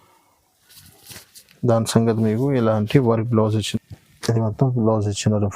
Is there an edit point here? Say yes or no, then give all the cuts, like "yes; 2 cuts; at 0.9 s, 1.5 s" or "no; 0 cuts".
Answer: yes; 1 cut; at 3.7 s